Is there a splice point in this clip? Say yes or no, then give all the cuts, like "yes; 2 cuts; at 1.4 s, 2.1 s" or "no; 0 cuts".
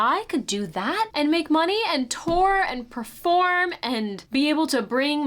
yes; 2 cuts; at 1.1 s, 4.2 s